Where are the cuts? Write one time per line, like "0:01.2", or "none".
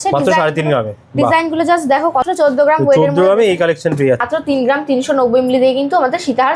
0:02.2
0:04.2